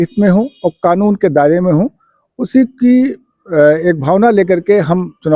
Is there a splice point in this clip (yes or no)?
no